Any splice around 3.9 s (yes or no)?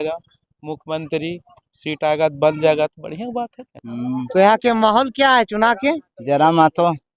yes